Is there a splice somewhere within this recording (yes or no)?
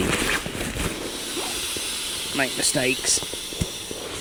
no